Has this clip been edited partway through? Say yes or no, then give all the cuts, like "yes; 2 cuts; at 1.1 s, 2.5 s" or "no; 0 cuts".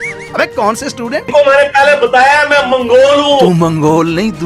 yes; 2 cuts; at 1.3 s, 3.5 s